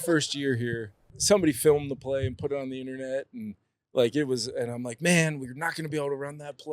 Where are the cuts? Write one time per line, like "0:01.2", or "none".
0:01.1